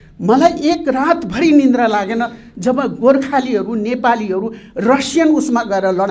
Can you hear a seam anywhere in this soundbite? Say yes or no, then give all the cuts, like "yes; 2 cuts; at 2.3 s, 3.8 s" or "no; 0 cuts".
no; 0 cuts